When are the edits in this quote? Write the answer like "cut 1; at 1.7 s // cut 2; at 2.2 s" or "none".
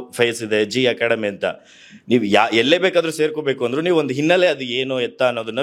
none

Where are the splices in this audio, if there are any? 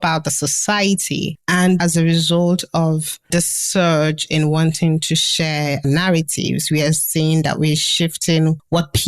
cut 1; at 1.8 s

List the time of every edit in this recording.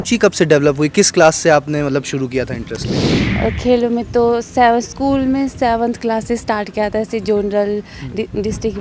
none

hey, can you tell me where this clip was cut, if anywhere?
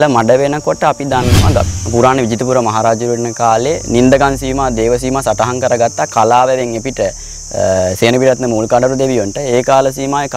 cut 1; at 1.6 s

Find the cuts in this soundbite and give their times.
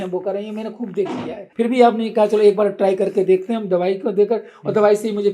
cut 1; at 1.4 s

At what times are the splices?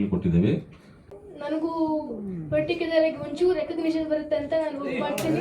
cut 1; at 1.1 s

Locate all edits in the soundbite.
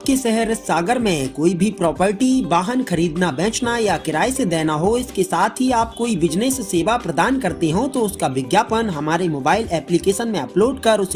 none

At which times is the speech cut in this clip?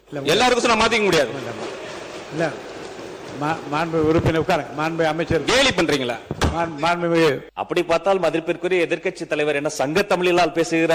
cut 1; at 7.5 s

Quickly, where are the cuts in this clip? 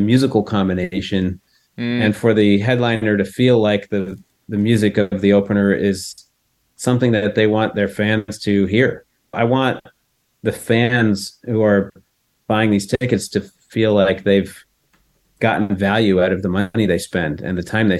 cut 1; at 9.4 s

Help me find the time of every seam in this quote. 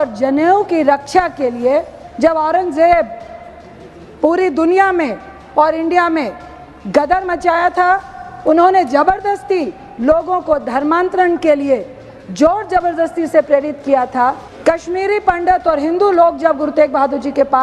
cut 1; at 2.0 s // cut 2; at 14.5 s

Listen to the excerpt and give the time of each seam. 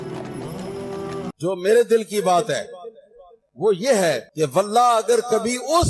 cut 1; at 1.3 s

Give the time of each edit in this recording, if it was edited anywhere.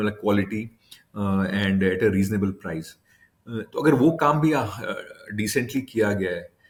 none

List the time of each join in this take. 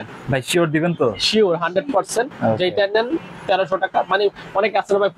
none

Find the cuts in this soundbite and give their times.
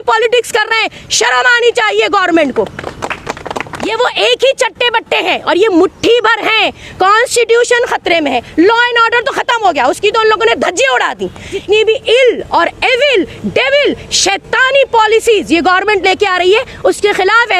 cut 1; at 3.8 s // cut 2; at 6.8 s // cut 3; at 11.6 s

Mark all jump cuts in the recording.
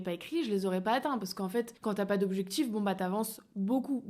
cut 1; at 1.7 s

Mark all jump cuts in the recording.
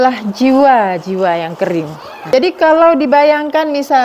cut 1; at 2.3 s

